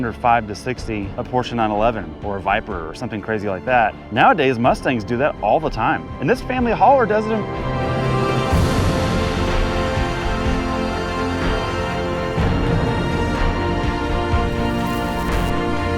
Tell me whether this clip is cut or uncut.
cut